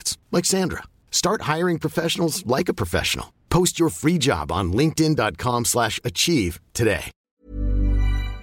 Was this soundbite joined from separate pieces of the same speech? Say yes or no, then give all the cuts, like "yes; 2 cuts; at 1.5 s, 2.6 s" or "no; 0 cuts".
yes; 1 cut; at 7.2 s